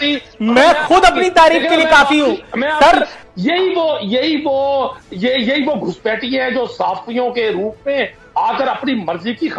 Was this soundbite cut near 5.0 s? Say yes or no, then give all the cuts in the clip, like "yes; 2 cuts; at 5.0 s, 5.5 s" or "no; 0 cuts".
no; 1 cut; at 3.2 s